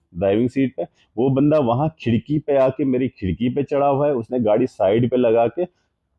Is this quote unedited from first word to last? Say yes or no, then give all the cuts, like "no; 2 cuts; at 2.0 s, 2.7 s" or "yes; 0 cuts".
yes; 0 cuts